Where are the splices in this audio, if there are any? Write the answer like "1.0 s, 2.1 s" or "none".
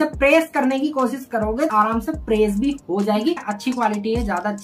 1.7 s, 3.5 s